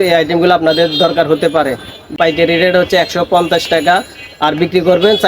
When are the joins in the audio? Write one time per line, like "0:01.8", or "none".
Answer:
0:02.1